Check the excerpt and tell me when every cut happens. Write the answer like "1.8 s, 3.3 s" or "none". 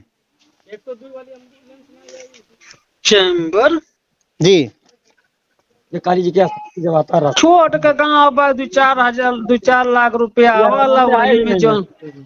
none